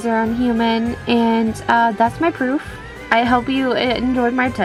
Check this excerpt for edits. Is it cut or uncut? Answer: uncut